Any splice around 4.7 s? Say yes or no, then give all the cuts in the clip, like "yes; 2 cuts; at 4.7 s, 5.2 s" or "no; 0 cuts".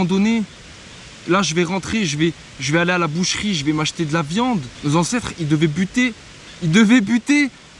yes; 1 cut; at 4.7 s